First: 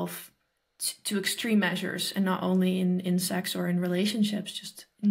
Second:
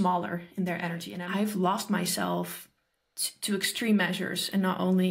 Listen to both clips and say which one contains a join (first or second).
second